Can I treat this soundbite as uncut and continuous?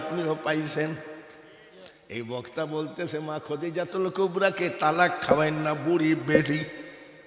yes; 0 cuts

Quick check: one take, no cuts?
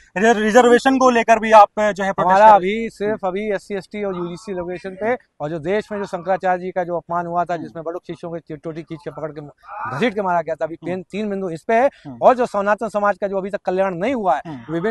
yes; 0 cuts

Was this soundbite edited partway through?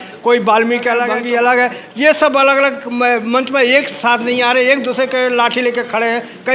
yes; 1 cut; at 1.2 s

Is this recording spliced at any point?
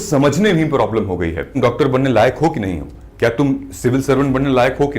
yes; 1 cut; at 1.5 s

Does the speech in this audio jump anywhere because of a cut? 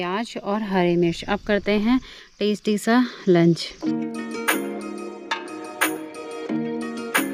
no; 0 cuts

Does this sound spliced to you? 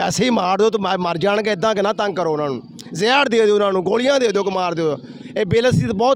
no; 0 cuts

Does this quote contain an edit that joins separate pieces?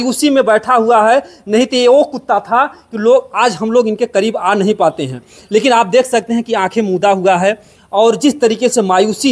no; 0 cuts

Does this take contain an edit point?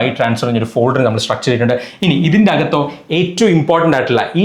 yes; 1 cut; at 1.9 s

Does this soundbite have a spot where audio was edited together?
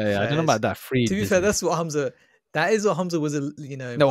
no; 0 cuts

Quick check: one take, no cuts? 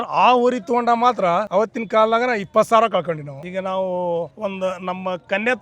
no; 1 cut; at 3.3 s

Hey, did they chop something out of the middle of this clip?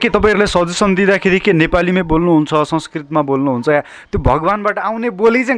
no; 0 cuts

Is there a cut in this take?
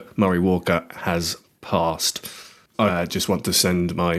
yes; 1 cut; at 2.9 s

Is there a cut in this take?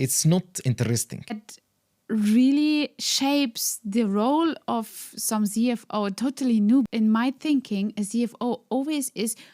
yes; 2 cuts; at 1.5 s, 6.9 s

